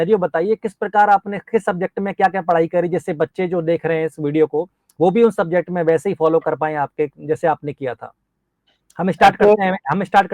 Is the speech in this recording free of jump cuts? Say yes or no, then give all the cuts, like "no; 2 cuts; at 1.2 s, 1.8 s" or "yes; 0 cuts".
yes; 0 cuts